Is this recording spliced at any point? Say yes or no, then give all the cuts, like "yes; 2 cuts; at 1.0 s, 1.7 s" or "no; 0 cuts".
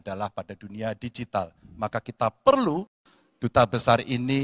no; 0 cuts